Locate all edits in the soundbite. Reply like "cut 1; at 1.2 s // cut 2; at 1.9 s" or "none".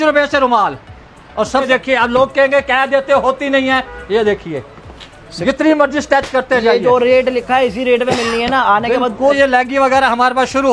cut 1; at 1.7 s // cut 2; at 9.4 s